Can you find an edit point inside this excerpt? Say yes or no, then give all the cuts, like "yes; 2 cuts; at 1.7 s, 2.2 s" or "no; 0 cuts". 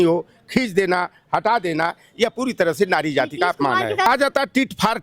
yes; 1 cut; at 4.0 s